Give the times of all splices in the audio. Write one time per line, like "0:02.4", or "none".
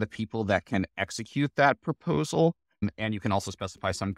0:02.9